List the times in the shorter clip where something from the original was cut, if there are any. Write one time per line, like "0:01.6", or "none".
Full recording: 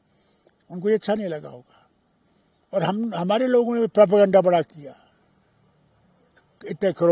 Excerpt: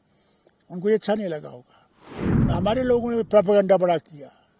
0:02.4